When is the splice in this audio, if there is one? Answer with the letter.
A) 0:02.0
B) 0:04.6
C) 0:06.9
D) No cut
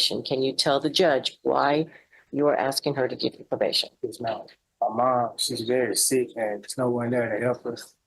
B